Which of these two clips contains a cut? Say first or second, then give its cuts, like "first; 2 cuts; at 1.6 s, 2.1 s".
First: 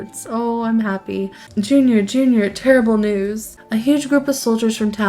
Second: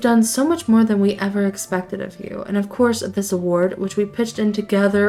first; 2 cuts; at 1.4 s, 3.5 s